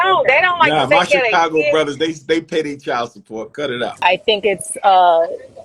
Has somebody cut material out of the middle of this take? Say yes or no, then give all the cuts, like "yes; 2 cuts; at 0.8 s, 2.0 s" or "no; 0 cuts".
yes; 1 cut; at 4.0 s